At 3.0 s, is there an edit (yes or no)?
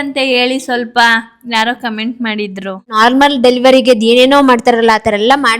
yes